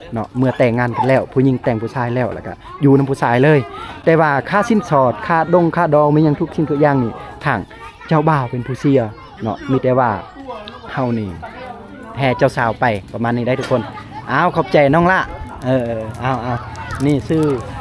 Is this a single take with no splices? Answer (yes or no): yes